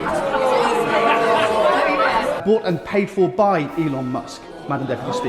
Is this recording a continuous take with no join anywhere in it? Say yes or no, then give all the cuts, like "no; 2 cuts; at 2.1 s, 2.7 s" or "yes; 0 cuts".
no; 1 cut; at 2.4 s